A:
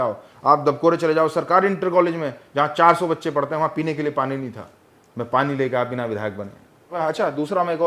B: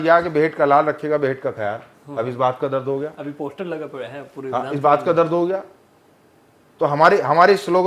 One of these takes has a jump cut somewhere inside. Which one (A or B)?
A